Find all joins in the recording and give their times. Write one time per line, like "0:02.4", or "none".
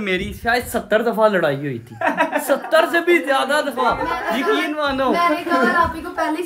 none